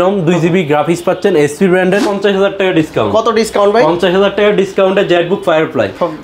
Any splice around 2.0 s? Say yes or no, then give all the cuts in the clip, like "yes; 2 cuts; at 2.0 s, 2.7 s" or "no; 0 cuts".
yes; 1 cut; at 2.0 s